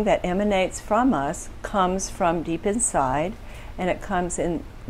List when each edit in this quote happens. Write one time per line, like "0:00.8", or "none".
none